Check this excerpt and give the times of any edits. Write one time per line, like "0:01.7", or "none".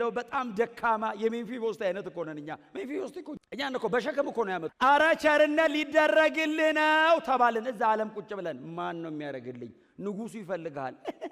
0:03.4
0:04.7